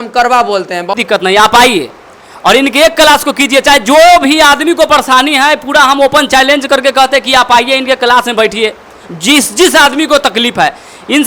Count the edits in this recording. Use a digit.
1